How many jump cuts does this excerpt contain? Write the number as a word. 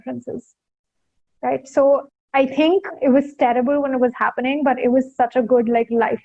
one